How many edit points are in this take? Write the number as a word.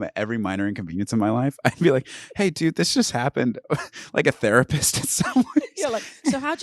zero